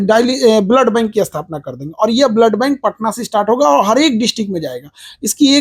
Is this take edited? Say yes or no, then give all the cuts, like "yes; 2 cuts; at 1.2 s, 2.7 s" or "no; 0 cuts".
no; 0 cuts